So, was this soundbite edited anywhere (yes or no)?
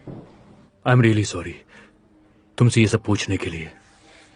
no